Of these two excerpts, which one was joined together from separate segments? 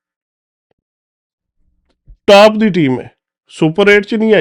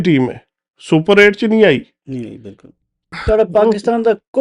second; 1 cut; at 3.1 s

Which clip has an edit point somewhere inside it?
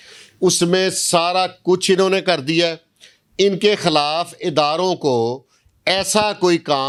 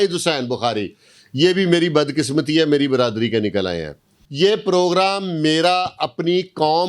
second; 1 cut; at 4.1 s

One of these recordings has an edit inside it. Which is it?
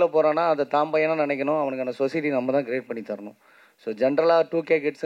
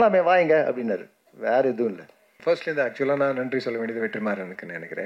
second; 1 cut; at 2.4 s

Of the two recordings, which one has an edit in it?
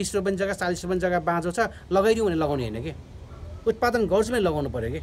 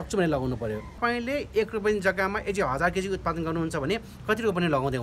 second; 1 cut; at 1.0 s

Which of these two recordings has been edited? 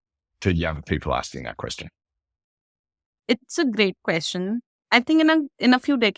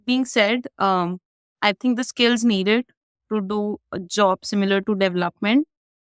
first; 2 cuts; at 3.0 s, 4.7 s

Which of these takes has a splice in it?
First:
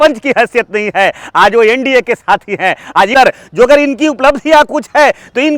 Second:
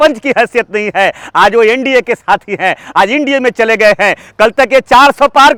first; 1 cut; at 3.1 s

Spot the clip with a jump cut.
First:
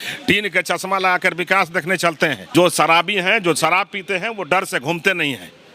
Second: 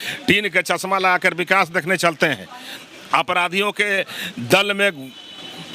first; 1 cut; at 2.4 s

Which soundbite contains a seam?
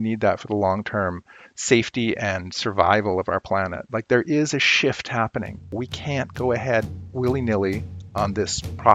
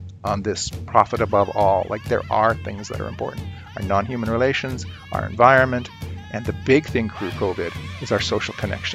first; 2 cuts; at 5.8 s, 7.0 s

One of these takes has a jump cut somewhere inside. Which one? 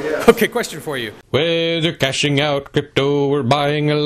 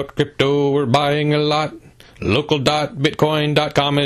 first; 1 cut; at 1.1 s

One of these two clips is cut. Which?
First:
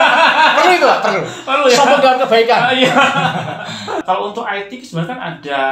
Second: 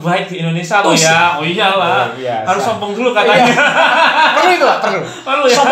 first; 1 cut; at 4.0 s

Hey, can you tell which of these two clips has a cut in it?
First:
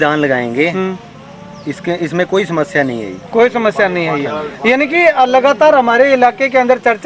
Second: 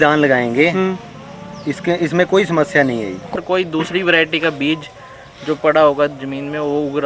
second; 1 cut; at 3.3 s

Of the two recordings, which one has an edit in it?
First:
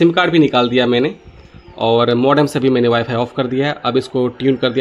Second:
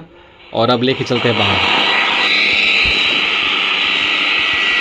second; 1 cut; at 2.3 s

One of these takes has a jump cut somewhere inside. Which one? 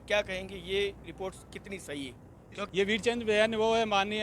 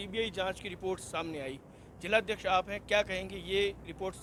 first; 1 cut; at 2.7 s

